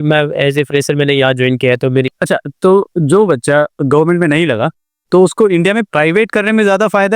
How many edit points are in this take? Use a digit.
1